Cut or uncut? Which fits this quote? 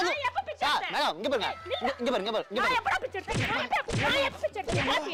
uncut